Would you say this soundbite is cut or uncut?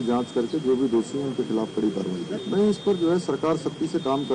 cut